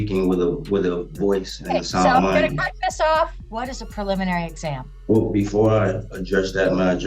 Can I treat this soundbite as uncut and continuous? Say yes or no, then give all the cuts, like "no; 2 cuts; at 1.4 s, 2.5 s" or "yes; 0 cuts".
no; 2 cuts; at 3.4 s, 4.9 s